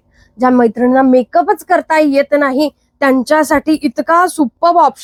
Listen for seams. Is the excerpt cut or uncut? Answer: uncut